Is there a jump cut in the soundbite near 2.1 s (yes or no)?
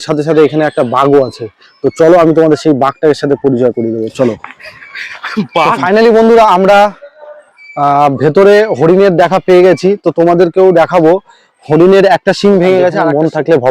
no